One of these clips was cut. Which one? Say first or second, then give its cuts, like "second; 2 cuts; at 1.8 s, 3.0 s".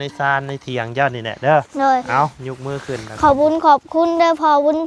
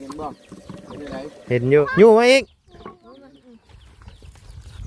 second; 1 cut; at 1.9 s